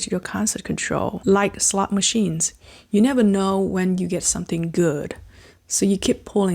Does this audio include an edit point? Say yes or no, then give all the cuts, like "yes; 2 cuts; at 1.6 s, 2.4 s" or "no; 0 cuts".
yes; 1 cut; at 1.2 s